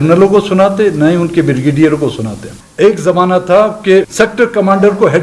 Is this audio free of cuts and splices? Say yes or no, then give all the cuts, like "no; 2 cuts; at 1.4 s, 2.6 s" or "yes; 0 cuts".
no; 2 cuts; at 2.6 s, 4.1 s